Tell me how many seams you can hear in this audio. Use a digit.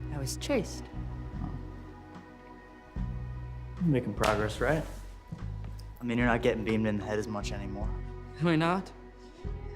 1